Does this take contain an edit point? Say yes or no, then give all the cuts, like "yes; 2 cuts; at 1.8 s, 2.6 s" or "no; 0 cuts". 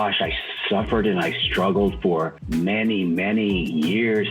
no; 0 cuts